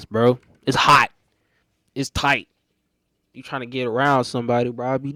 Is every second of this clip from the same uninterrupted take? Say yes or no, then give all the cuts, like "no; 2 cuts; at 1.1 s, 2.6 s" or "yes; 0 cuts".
yes; 0 cuts